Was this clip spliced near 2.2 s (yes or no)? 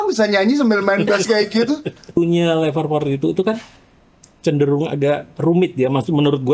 yes